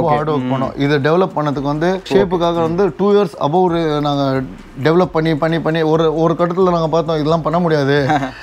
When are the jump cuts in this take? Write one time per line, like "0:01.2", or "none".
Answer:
0:02.1